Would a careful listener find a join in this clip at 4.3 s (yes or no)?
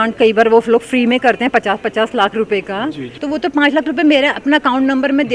no